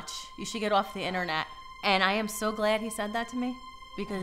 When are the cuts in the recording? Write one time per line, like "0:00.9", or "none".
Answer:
0:01.6